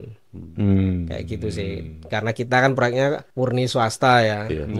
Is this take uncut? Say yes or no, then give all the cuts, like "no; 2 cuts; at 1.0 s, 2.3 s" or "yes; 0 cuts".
no; 1 cut; at 3.3 s